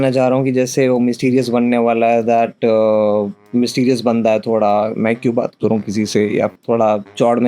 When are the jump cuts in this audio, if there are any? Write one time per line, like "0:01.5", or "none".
0:06.5